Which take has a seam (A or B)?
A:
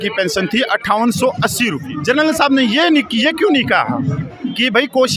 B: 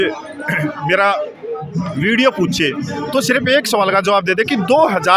A